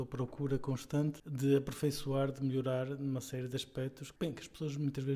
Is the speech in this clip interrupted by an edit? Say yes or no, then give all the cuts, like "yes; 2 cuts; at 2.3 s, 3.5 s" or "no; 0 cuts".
yes; 2 cuts; at 1.3 s, 4.0 s